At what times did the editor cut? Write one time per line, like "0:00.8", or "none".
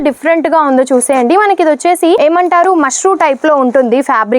0:02.2